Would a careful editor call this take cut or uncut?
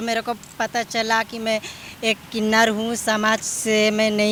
uncut